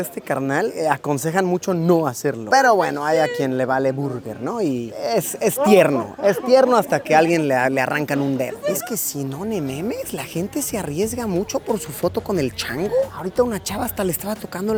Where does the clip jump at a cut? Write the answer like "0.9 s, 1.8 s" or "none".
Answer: none